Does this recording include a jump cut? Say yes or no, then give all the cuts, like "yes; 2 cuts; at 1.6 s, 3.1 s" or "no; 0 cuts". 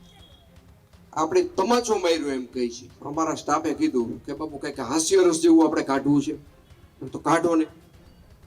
yes; 1 cut; at 3.0 s